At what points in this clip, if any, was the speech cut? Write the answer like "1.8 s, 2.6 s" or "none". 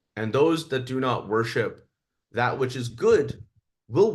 none

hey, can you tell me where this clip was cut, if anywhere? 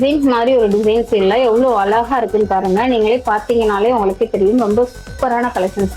none

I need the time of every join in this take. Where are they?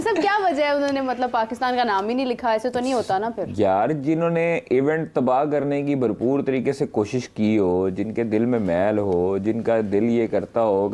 none

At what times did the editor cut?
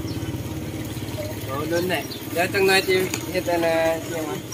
none

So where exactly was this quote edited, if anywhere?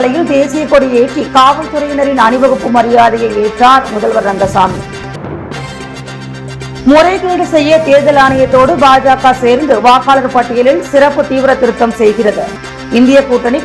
none

